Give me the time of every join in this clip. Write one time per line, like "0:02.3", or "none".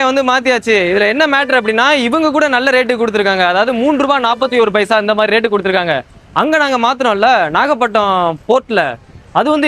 none